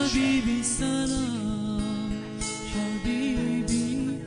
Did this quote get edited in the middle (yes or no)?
no